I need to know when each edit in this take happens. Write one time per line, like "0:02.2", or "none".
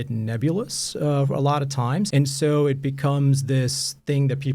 0:02.1